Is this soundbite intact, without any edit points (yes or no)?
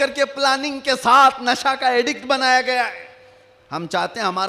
yes